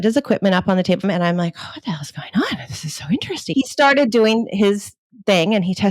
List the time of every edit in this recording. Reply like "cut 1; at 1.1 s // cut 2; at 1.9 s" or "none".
cut 1; at 1.0 s // cut 2; at 3.4 s